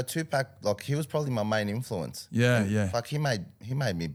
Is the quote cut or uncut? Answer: uncut